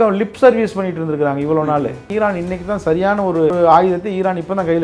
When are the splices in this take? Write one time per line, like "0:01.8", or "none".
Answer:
0:02.1
0:03.5